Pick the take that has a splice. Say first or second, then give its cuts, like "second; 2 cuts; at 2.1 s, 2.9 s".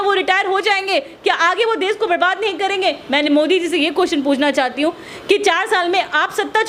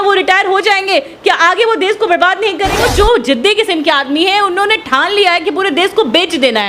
second; 1 cut; at 2.8 s